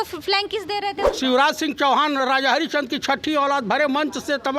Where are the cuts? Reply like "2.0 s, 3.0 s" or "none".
1.1 s